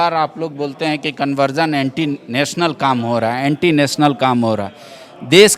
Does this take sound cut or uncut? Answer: uncut